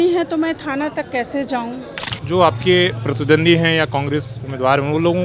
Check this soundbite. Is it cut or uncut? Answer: cut